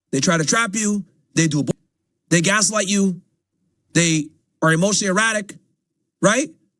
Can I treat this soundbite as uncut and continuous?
no; 1 cut; at 1.7 s

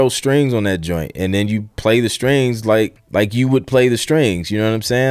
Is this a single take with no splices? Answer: no; 1 cut; at 3.0 s

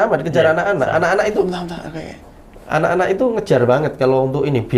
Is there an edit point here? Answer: no; 0 cuts

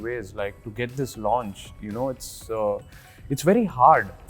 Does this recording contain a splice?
no; 0 cuts

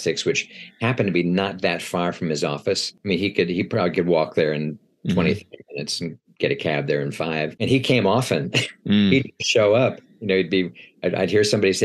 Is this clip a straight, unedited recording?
no; 2 cuts; at 2.9 s, 7.5 s

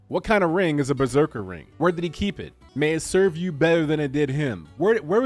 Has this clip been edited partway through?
yes; 2 cuts; at 1.6 s, 2.5 s

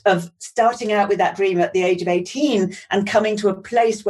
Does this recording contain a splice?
no; 0 cuts

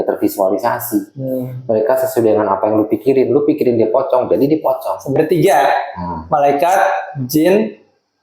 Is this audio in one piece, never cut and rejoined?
no; 1 cut; at 5.2 s

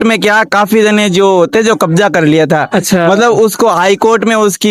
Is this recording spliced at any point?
no; 0 cuts

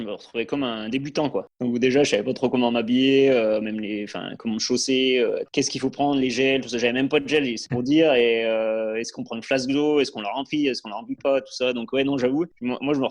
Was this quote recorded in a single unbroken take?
no; 3 cuts; at 1.5 s, 5.5 s, 7.6 s

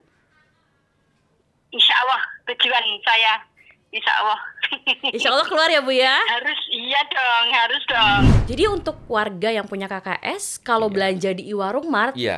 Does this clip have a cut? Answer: yes; 1 cut; at 8.3 s

